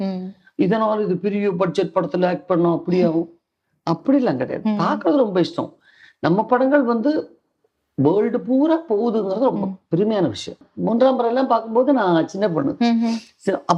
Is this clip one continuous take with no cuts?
no; 1 cut; at 10.6 s

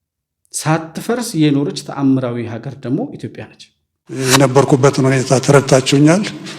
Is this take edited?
yes; 1 cut; at 4.2 s

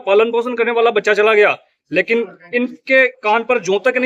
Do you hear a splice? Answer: no; 0 cuts

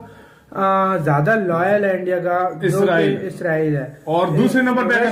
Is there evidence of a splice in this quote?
no; 0 cuts

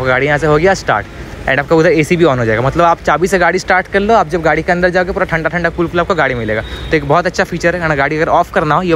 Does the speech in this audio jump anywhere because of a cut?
no; 0 cuts

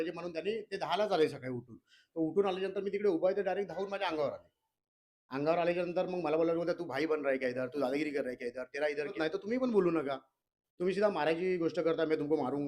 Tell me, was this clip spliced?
yes; 1 cut; at 9.2 s

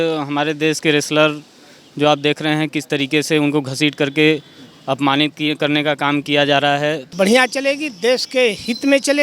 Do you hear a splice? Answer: yes; 1 cut; at 7.0 s

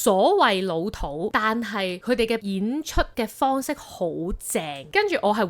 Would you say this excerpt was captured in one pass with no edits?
yes; 0 cuts

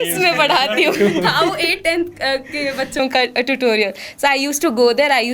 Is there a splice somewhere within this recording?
no; 0 cuts

